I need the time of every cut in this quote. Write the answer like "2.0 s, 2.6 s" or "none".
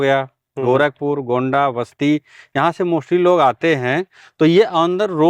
none